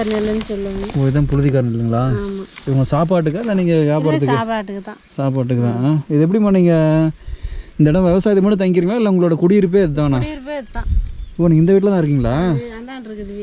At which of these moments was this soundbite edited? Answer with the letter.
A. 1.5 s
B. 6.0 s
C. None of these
C